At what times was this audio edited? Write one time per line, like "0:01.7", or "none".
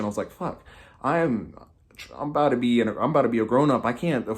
none